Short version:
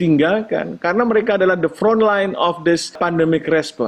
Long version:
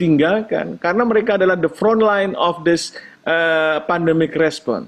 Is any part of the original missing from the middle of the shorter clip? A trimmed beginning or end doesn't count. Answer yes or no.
yes